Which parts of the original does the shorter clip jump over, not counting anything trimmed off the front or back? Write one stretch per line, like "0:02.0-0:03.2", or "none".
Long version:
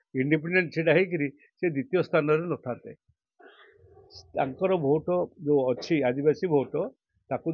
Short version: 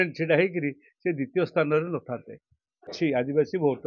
0:03.5-0:05.8